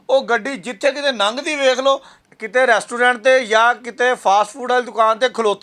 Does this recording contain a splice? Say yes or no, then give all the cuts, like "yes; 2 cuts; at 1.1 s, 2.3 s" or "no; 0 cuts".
no; 0 cuts